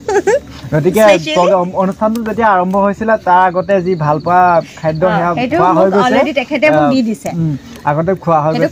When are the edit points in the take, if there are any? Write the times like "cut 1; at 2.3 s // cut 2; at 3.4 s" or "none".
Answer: none